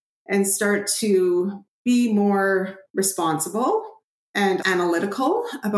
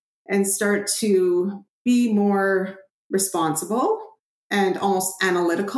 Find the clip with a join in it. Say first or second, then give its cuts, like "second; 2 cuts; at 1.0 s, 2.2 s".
first; 2 cuts; at 2.8 s, 4.6 s